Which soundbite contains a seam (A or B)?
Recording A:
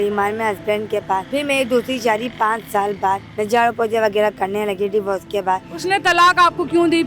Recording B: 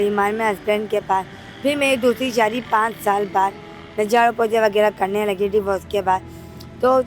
A